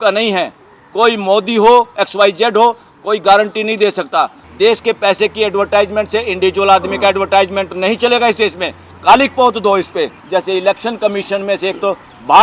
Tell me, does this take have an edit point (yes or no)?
yes